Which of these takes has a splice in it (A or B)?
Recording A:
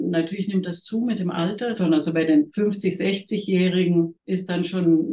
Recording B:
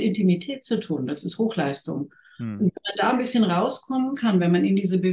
A